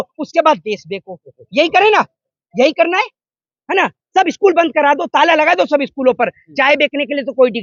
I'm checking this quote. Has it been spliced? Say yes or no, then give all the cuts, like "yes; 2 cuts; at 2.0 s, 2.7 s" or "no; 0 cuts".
no; 0 cuts